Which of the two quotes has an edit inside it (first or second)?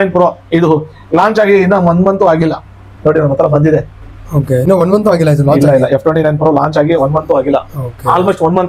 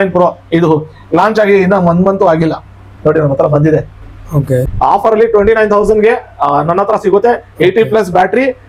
second